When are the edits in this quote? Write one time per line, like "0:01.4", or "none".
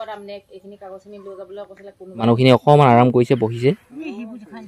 0:02.2

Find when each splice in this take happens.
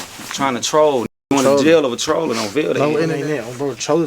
0:03.1

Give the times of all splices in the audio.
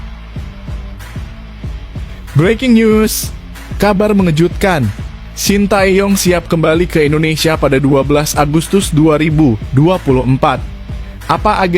0:02.3

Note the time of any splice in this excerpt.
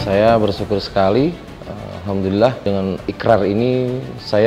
0:02.6

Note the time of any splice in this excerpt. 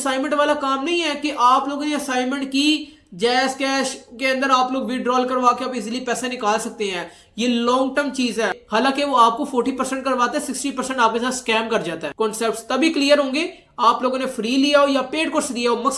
0:08.6
0:12.1

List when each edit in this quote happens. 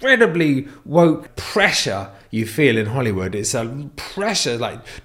0:01.2

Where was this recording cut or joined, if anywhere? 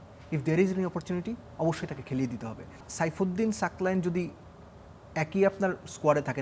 0:02.9

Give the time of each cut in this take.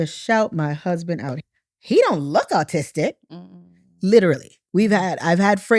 0:01.4

